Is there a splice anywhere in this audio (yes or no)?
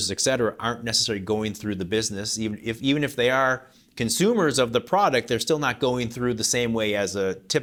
no